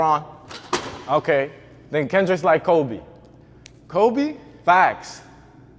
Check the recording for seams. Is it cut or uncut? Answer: uncut